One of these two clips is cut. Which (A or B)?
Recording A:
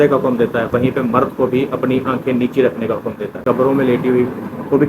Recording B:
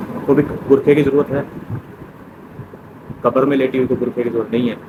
A